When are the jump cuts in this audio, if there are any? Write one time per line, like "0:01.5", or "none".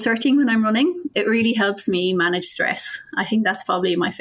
0:01.0